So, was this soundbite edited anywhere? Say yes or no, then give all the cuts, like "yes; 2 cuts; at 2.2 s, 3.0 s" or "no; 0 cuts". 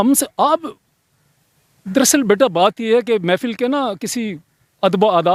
no; 0 cuts